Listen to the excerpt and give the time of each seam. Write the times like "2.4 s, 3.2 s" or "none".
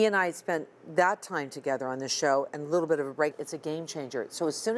3.4 s